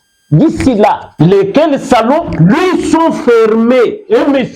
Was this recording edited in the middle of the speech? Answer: yes; 1 cut; at 1.1 s

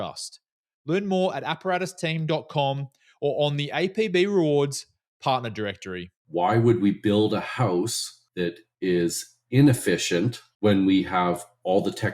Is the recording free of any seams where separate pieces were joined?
no; 1 cut; at 6.1 s

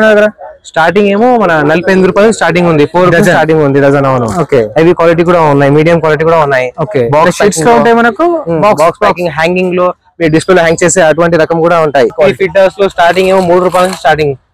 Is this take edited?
yes; 1 cut; at 12.1 s

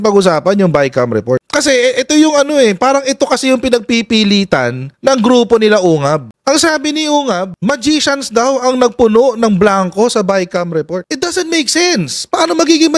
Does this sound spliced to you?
no; 0 cuts

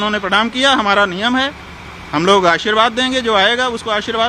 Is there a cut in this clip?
no; 0 cuts

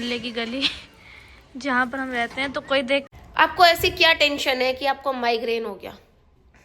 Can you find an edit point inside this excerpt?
yes; 1 cut; at 3.1 s

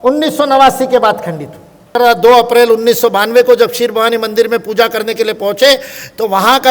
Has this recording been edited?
yes; 1 cut; at 1.9 s

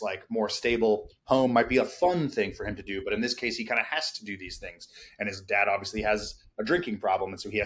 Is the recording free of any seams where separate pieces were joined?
yes; 0 cuts

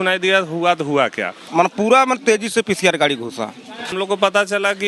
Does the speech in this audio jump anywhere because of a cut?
yes; 2 cuts; at 1.4 s, 3.9 s

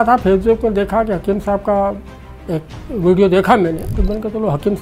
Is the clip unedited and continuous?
no; 1 cut; at 3.9 s

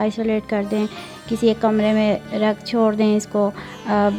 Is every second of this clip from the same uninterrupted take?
yes; 0 cuts

